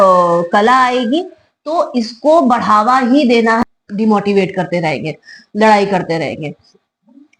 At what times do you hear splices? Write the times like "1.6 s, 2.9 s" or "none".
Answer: 3.6 s